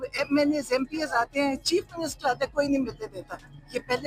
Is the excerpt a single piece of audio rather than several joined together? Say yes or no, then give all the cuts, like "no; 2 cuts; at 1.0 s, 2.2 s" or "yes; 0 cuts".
yes; 0 cuts